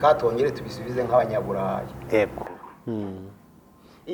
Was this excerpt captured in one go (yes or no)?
no